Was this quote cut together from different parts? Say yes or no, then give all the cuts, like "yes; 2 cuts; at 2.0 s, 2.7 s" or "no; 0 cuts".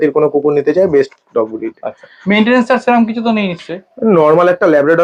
no; 0 cuts